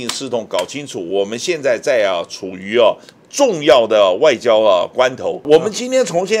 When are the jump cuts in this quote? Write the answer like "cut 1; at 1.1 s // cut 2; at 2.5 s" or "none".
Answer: cut 1; at 5.5 s